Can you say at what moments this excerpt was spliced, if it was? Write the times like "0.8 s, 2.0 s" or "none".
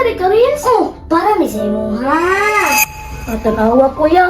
2.8 s